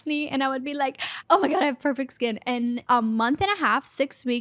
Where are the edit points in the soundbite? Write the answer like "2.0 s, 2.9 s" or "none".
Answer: 1.1 s, 2.8 s